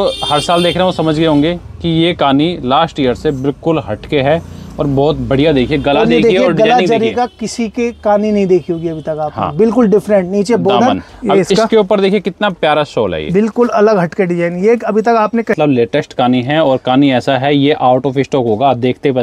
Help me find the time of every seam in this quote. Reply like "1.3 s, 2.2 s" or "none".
11.1 s, 15.6 s

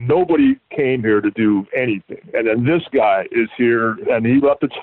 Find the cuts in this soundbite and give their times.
2.1 s, 4.0 s

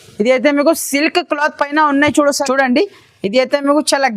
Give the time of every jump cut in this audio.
2.4 s

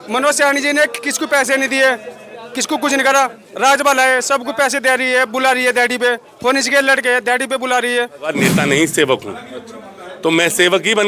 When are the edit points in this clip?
8.4 s

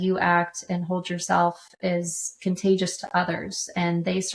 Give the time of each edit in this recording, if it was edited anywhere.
none

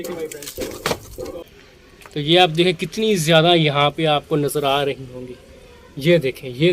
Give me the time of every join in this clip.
1.4 s

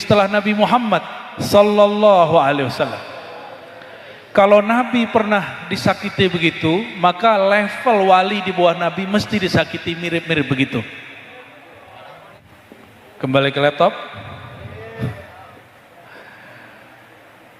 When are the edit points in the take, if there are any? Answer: 12.4 s

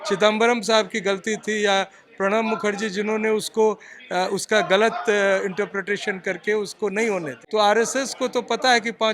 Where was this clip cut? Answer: 7.4 s

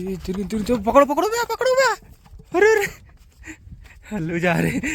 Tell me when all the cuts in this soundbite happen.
none

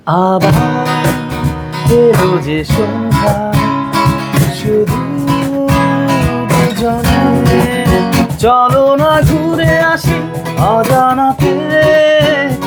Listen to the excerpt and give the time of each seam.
none

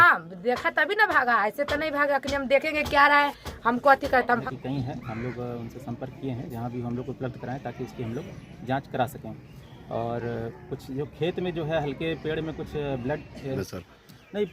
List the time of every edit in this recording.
4.4 s, 13.6 s

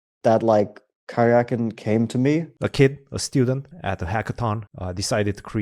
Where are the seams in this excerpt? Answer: 2.6 s, 3.7 s, 4.7 s

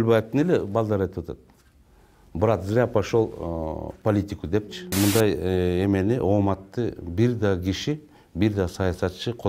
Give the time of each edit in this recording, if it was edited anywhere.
4.8 s

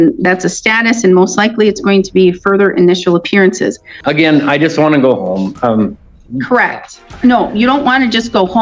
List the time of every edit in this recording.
3.9 s

